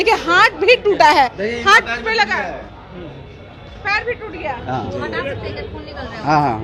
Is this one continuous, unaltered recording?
yes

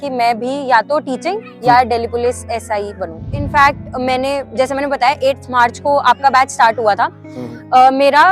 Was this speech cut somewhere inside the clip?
yes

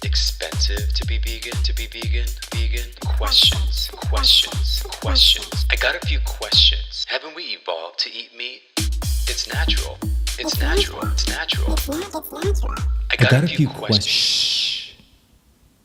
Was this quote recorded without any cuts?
yes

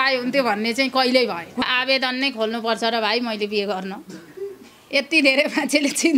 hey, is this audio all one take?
no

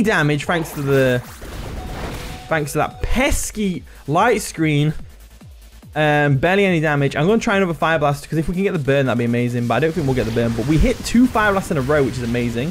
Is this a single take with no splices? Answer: yes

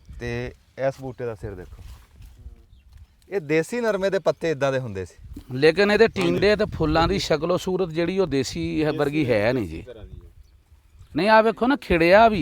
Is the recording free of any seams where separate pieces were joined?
yes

